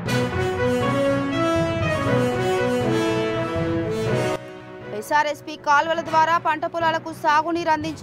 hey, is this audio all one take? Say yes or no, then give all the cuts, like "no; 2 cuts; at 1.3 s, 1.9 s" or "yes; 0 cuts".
yes; 0 cuts